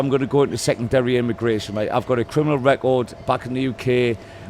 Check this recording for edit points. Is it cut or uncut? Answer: uncut